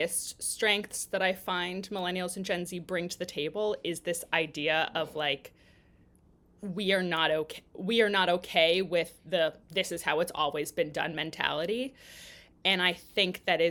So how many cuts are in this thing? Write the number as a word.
zero